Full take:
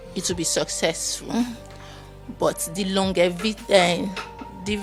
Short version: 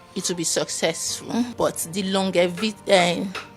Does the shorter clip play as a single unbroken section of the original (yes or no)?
no